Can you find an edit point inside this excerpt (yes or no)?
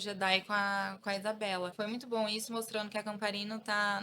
yes